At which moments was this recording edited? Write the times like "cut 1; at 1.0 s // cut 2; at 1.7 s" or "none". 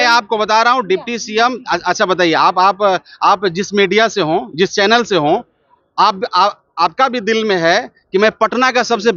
none